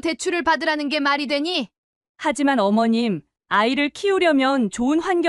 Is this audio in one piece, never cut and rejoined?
yes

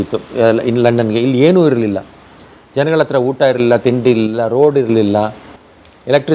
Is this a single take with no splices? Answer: yes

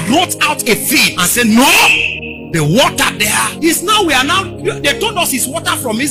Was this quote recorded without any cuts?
yes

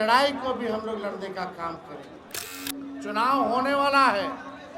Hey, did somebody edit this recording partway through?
yes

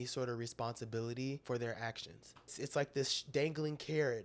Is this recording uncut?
no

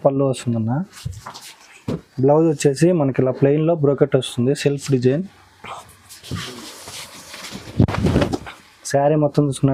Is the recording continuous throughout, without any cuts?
yes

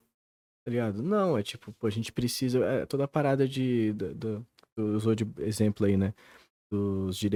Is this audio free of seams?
yes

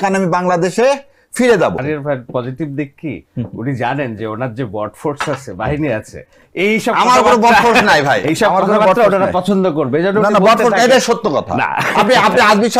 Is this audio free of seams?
no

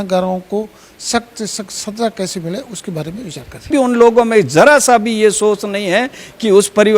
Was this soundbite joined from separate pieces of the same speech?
yes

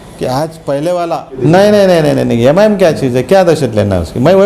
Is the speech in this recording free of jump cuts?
no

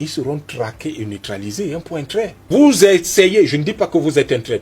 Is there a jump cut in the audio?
yes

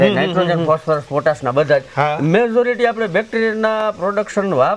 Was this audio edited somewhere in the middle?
no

